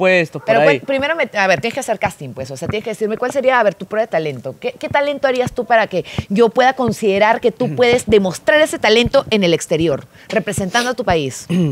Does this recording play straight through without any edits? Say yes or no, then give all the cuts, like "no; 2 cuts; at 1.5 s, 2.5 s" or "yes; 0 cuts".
yes; 0 cuts